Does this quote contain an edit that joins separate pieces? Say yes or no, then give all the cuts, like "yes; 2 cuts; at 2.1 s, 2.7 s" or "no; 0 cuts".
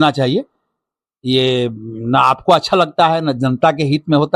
no; 0 cuts